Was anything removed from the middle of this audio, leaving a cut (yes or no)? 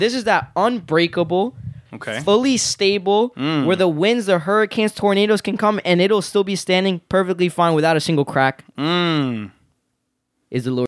no